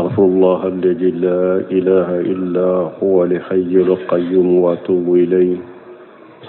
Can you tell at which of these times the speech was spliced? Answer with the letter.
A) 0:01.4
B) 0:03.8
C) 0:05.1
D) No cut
A